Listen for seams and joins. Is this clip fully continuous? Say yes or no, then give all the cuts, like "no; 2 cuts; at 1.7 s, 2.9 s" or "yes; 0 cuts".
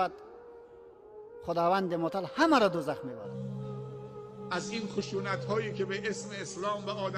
no; 1 cut; at 3.3 s